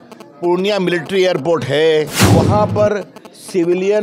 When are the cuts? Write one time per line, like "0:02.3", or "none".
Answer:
0:02.2